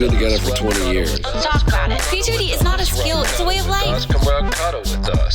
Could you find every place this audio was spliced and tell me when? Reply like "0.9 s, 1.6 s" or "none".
none

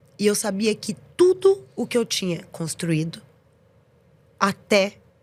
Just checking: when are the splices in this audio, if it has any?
none

